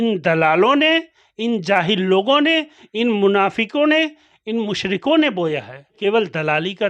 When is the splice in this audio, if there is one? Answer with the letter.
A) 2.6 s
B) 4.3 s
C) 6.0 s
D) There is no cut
C